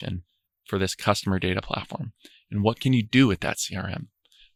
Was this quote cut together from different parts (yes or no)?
no